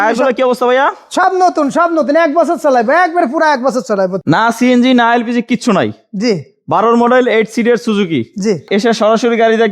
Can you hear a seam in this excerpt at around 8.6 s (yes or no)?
yes